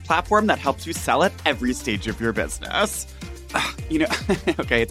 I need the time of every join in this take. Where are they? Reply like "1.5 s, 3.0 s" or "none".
3.1 s